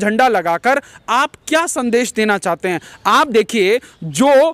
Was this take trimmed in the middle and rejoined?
no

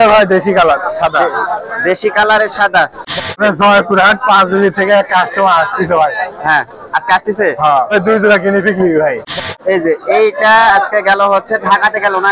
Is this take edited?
yes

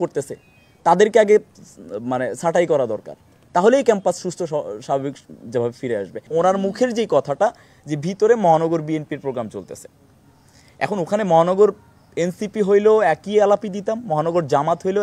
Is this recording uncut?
no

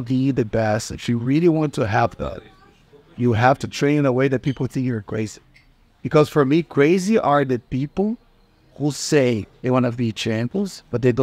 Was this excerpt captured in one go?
yes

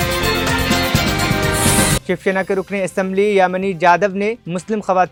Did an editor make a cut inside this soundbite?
no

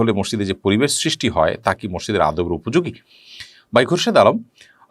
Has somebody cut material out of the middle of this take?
no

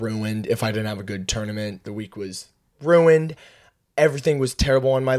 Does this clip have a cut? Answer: no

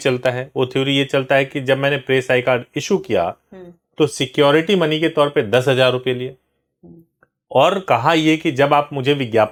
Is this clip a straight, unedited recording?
yes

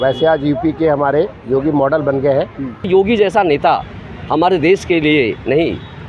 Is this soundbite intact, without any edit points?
no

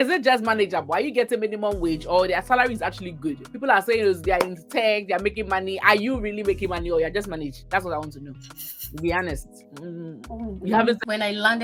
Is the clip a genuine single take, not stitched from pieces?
yes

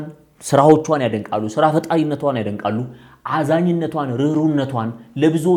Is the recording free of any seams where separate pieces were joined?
yes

